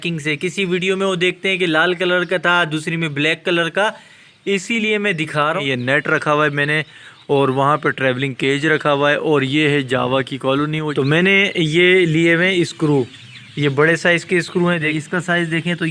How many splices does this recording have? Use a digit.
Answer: 3